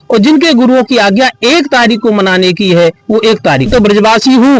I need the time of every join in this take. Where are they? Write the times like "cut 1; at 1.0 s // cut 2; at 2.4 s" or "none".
cut 1; at 3.7 s